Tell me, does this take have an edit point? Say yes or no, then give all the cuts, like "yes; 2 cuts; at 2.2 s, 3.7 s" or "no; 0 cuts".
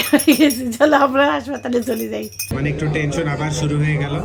yes; 1 cut; at 2.5 s